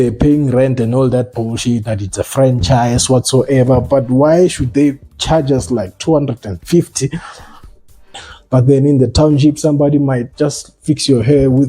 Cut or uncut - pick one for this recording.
cut